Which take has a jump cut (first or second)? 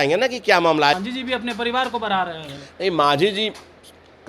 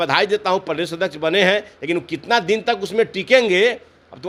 first